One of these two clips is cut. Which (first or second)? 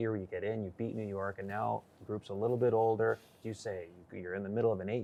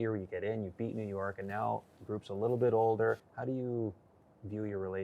second